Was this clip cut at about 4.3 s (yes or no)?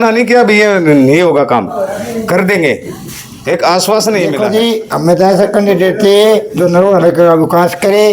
yes